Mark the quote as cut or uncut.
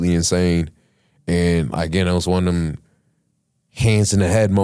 uncut